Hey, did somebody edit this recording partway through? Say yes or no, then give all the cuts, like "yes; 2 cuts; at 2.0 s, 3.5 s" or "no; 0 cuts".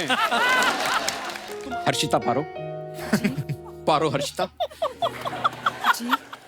yes; 1 cut; at 1.4 s